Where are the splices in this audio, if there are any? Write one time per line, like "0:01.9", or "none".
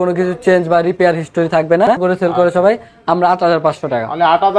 0:02.0